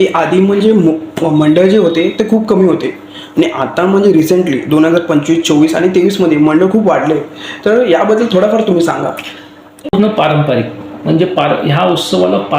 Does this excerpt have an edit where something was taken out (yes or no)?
yes